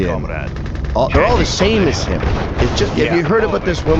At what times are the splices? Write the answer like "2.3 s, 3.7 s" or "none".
none

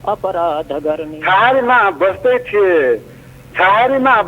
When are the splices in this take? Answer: 1.1 s

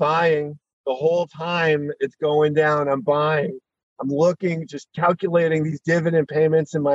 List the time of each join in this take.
none

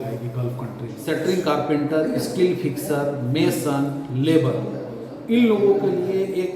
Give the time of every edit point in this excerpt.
1.0 s

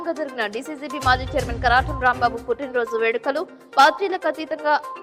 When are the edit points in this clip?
none

